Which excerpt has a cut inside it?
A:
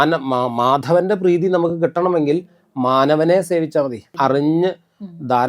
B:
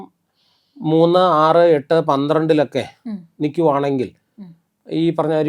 A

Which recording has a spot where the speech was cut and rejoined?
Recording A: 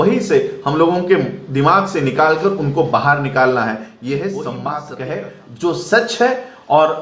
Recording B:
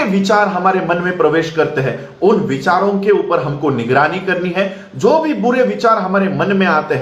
A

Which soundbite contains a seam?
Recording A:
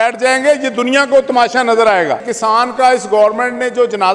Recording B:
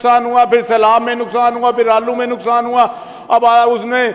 A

